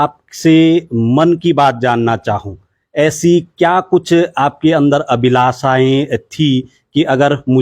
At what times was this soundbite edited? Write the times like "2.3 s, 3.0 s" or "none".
none